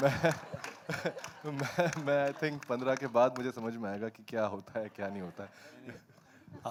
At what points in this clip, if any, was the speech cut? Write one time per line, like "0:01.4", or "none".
none